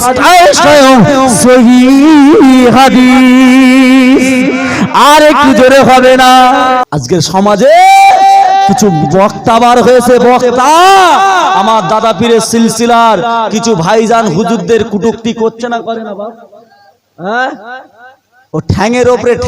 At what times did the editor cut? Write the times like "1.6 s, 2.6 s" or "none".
6.8 s